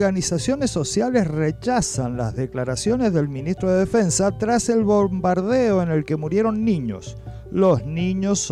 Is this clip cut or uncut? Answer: uncut